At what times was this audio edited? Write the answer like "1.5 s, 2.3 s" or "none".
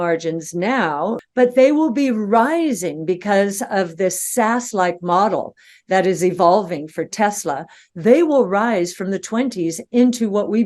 1.2 s